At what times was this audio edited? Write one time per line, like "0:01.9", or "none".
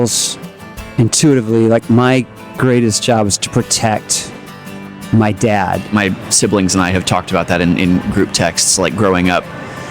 0:05.9